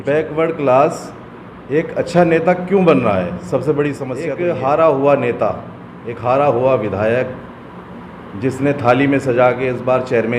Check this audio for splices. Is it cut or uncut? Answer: cut